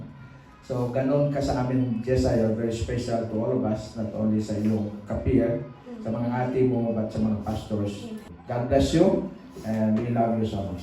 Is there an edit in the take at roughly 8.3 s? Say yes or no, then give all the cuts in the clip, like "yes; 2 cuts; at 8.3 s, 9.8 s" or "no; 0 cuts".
yes; 1 cut; at 8.3 s